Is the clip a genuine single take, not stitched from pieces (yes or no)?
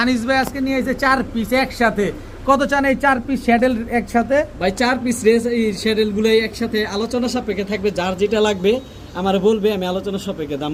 yes